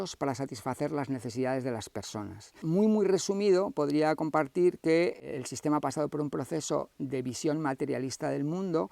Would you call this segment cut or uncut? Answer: uncut